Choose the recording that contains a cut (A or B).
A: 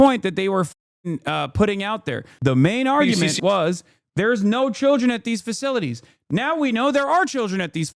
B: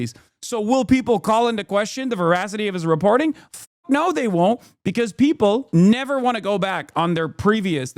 B